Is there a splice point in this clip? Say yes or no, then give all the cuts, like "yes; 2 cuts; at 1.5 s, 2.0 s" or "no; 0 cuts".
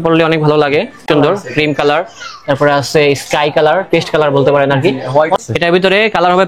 yes; 2 cuts; at 1.0 s, 5.4 s